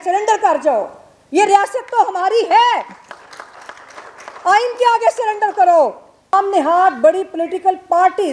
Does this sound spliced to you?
yes; 1 cut; at 6.3 s

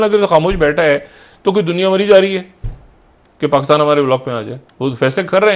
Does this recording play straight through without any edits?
yes; 0 cuts

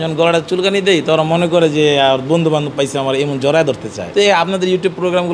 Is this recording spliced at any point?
yes; 1 cut; at 4.0 s

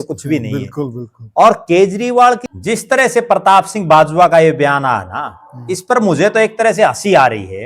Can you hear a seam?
yes; 1 cut; at 2.5 s

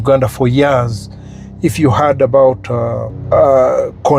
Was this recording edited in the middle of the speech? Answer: yes; 1 cut; at 3.1 s

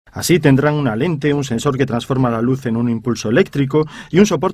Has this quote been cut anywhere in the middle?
yes; 1 cut; at 1.5 s

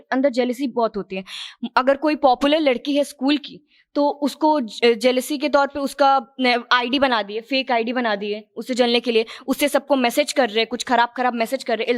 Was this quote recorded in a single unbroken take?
yes; 0 cuts

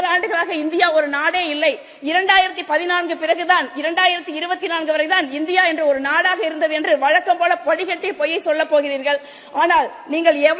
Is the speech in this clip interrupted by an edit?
no; 0 cuts

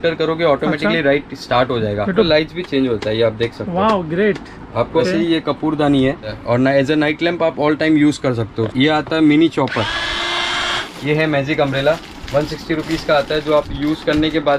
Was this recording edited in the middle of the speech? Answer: yes; 5 cuts; at 2.3 s, 5.0 s, 6.3 s, 8.7 s, 10.8 s

